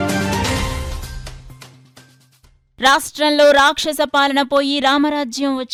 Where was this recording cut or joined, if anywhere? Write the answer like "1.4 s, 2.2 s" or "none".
none